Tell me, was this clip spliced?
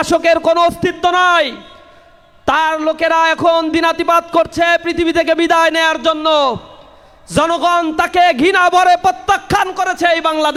no; 0 cuts

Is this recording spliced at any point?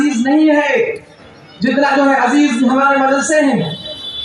no; 0 cuts

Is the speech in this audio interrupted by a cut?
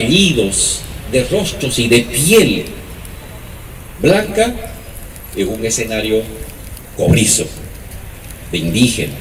no; 0 cuts

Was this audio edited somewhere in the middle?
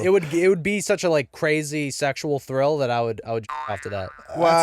no; 0 cuts

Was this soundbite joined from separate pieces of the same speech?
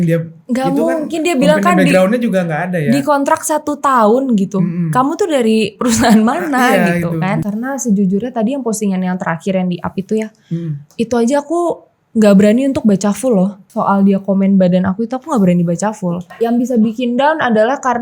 yes; 3 cuts; at 7.4 s, 13.6 s, 16.3 s

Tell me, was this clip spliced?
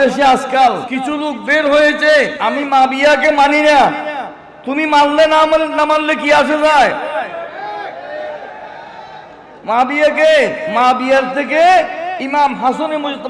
yes; 3 cuts; at 0.9 s, 2.3 s, 10.6 s

